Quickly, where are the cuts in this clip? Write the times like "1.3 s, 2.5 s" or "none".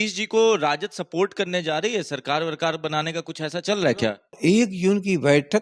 4.3 s

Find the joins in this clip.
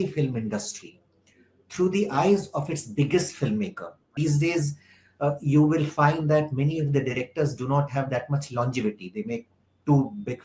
4.1 s

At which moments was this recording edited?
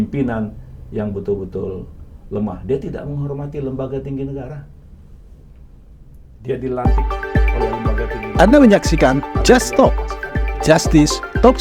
6.8 s

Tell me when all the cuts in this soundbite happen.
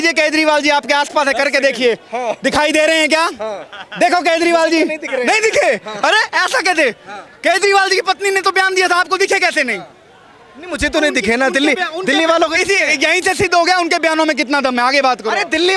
none

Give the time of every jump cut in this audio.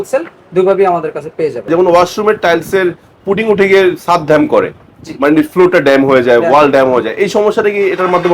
1.7 s

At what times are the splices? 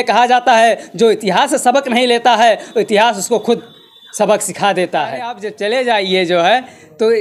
5.5 s

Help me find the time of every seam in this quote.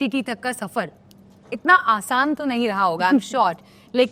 none

